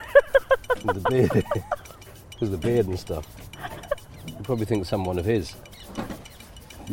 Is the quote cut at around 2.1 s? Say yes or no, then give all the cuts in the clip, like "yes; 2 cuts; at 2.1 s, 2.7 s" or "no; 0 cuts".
no; 0 cuts